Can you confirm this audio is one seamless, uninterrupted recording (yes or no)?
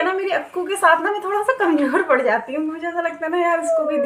yes